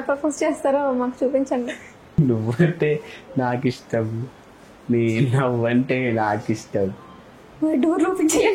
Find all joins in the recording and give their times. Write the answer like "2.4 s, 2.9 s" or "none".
none

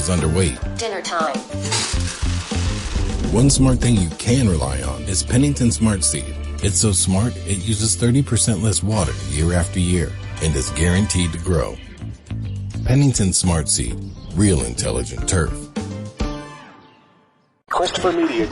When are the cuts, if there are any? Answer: 17.6 s

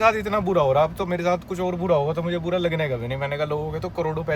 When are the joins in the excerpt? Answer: none

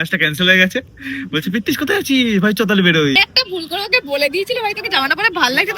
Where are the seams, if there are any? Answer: 3.2 s

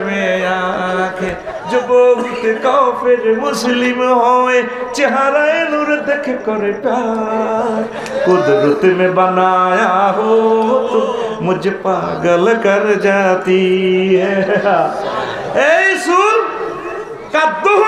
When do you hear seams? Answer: none

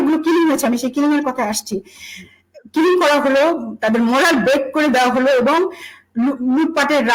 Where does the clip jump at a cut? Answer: none

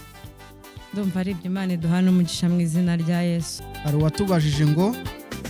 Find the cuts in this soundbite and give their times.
3.5 s

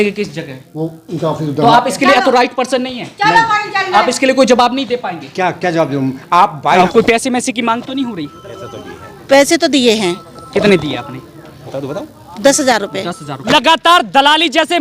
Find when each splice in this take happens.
6.7 s, 13.3 s

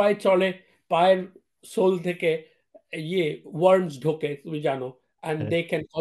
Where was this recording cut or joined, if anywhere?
none

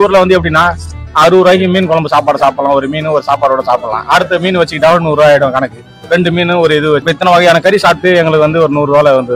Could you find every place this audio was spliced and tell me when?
none

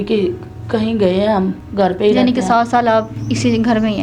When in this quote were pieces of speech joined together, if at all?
1.6 s

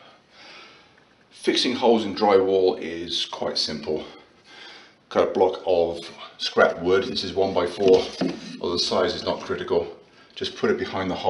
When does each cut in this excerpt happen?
none

